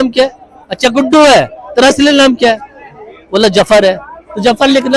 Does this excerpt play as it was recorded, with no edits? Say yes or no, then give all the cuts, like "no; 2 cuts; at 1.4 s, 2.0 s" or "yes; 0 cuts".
yes; 0 cuts